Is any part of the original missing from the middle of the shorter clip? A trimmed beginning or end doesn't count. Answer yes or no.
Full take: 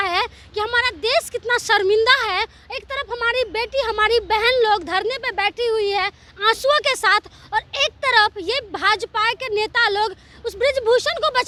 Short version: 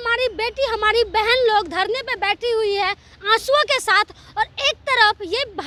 no